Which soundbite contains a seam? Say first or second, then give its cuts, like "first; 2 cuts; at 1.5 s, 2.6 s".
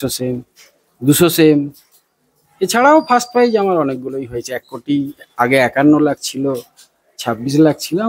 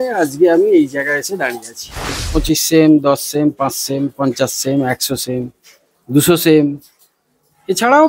second; 1 cut; at 2.2 s